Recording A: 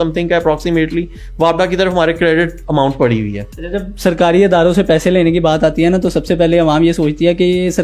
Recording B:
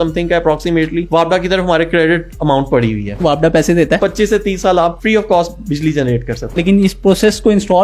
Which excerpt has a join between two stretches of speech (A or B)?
B